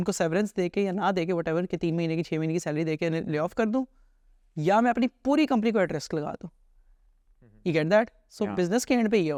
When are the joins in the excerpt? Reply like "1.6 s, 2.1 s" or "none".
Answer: none